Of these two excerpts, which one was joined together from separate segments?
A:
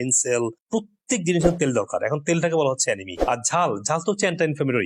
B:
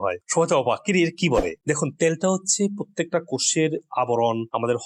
A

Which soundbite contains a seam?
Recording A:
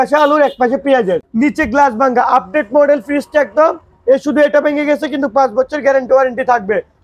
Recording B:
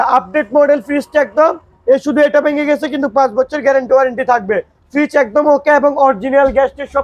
A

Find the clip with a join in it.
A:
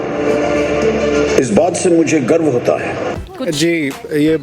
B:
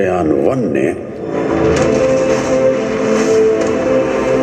A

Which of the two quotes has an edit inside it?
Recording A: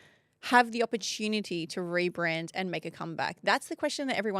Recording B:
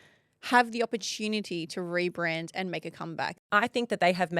B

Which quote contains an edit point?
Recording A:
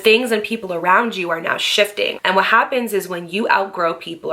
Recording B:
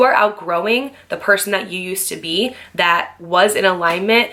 A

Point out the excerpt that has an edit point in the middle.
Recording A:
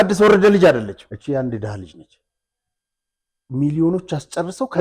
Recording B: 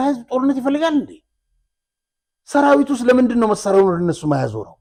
A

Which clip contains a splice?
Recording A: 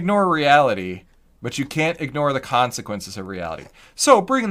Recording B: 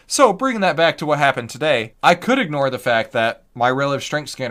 B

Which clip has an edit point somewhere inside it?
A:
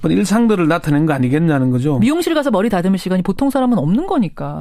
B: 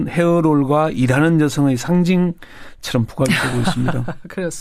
B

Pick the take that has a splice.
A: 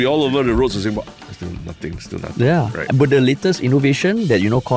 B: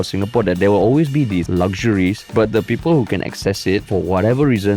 B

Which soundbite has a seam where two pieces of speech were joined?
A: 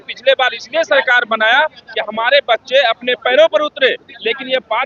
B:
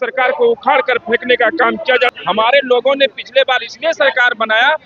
B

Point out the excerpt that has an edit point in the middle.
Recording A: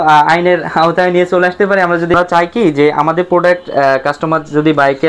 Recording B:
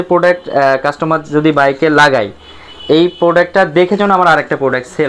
A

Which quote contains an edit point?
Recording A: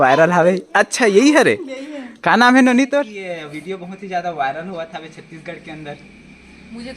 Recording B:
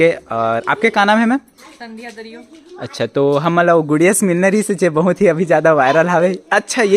A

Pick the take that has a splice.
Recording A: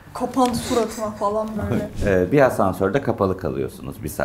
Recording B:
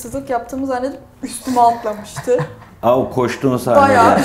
A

